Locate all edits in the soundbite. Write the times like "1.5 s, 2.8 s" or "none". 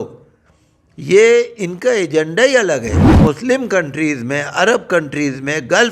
3.1 s